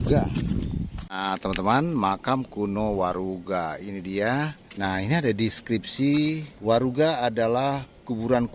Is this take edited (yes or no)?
yes